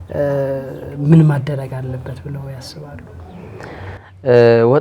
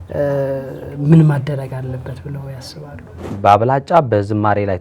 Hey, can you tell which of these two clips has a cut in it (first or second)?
second